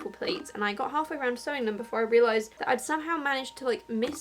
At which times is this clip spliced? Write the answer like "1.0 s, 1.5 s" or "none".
2.5 s